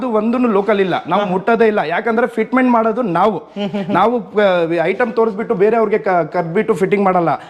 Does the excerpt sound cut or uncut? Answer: uncut